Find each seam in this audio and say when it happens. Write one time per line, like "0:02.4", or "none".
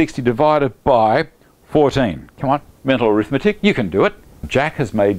0:04.3